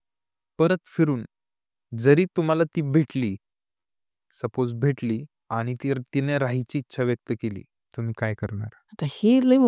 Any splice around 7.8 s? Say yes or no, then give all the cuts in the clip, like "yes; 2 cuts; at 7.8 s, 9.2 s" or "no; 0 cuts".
yes; 3 cuts; at 5.3 s, 7.8 s, 8.8 s